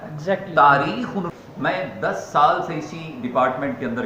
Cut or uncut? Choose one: cut